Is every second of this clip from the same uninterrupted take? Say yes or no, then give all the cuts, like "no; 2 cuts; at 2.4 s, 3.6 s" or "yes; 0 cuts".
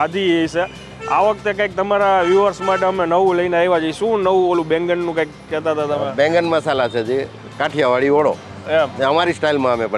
yes; 0 cuts